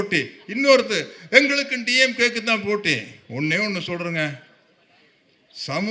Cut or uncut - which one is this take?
uncut